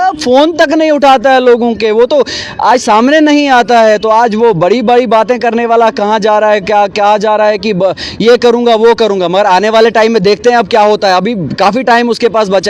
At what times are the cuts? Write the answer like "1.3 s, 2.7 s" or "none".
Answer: none